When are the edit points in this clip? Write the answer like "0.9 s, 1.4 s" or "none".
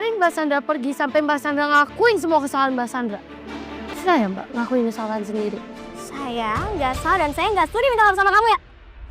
3.9 s

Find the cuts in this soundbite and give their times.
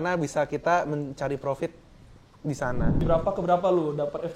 3.0 s

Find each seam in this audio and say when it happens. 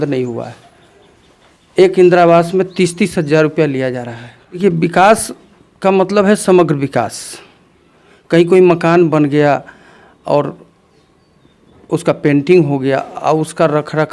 4.6 s

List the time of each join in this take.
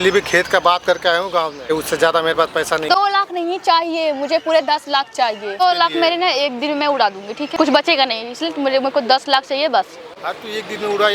1.7 s, 2.9 s, 5.6 s, 7.5 s

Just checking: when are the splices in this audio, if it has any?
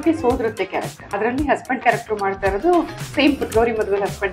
1.2 s

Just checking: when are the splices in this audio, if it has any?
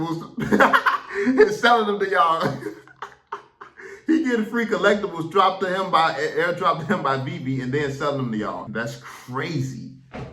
8.7 s

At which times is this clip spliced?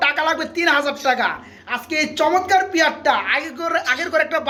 none

